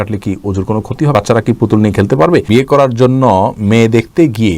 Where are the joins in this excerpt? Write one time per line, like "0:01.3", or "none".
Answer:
0:01.1
0:02.5